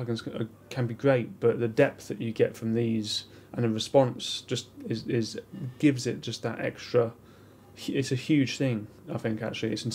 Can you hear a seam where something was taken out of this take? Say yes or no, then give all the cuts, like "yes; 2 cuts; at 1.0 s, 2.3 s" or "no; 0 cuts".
no; 0 cuts